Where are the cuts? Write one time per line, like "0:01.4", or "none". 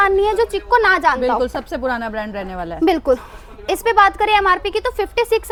none